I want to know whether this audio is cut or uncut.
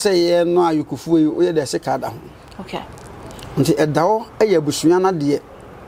uncut